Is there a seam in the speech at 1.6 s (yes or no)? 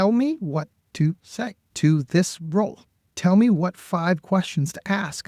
yes